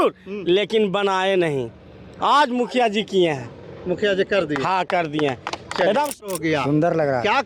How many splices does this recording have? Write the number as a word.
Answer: one